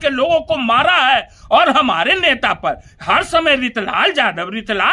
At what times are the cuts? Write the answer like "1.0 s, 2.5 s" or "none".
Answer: none